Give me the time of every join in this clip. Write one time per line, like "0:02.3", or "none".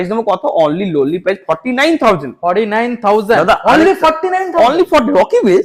none